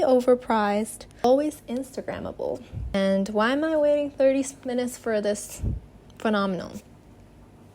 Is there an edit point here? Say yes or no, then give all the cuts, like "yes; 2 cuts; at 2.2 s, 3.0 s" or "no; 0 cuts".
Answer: yes; 2 cuts; at 1.2 s, 2.9 s